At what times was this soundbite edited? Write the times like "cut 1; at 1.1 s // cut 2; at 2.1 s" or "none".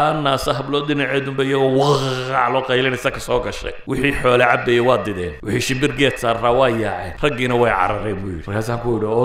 cut 1; at 3.7 s // cut 2; at 5.3 s // cut 3; at 7.1 s // cut 4; at 8.3 s